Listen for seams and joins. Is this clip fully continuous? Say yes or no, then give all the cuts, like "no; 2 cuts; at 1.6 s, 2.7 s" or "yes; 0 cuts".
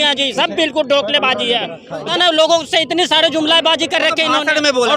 no; 1 cut; at 2.1 s